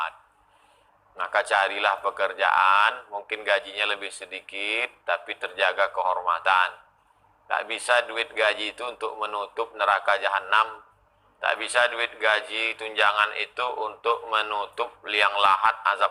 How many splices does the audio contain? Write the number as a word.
zero